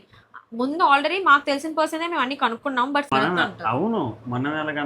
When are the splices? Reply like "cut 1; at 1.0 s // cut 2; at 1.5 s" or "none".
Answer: cut 1; at 3.1 s